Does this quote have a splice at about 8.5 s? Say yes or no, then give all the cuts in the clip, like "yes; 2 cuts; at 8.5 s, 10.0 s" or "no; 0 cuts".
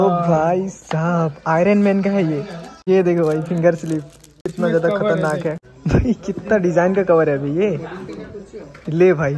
no; 2 cuts; at 2.7 s, 5.7 s